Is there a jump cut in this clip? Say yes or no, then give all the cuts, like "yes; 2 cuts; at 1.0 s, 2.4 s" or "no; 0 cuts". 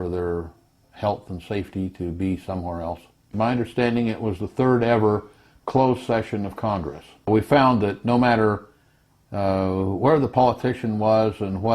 yes; 2 cuts; at 3.3 s, 7.3 s